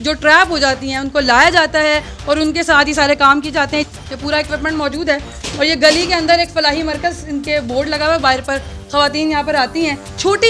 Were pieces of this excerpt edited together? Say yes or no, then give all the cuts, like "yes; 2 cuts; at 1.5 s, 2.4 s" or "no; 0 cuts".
no; 0 cuts